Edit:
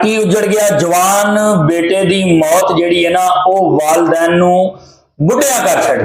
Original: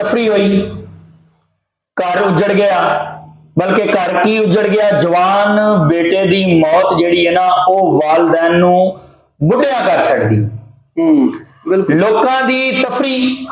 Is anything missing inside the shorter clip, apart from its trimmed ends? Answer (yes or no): no